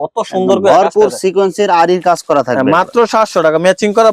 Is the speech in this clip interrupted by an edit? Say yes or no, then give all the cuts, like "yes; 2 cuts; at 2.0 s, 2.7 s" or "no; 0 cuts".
no; 0 cuts